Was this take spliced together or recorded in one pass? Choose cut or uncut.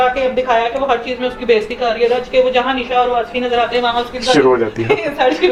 uncut